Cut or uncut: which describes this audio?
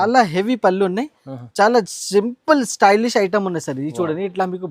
uncut